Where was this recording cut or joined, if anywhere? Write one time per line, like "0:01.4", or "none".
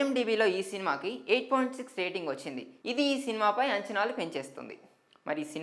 none